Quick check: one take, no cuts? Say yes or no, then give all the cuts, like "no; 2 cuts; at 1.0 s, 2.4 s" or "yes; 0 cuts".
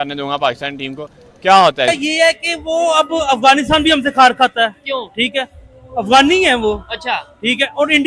no; 1 cut; at 1.9 s